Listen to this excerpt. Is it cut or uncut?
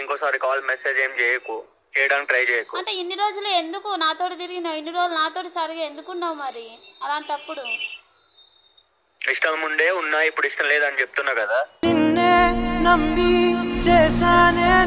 uncut